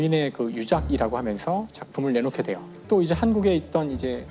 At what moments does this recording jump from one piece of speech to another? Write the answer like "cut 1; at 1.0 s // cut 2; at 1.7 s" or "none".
cut 1; at 2.8 s